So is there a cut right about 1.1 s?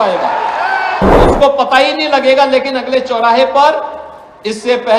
yes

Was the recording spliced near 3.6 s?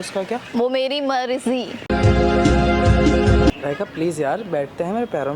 yes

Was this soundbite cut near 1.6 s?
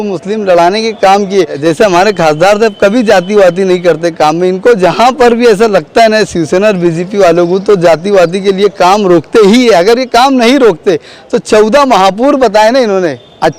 yes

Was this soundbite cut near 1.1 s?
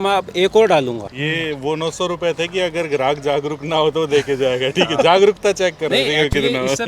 yes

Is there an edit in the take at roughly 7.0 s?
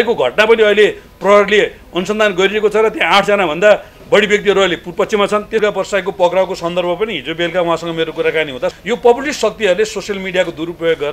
no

